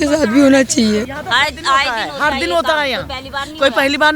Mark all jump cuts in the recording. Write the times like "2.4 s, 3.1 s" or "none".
1.1 s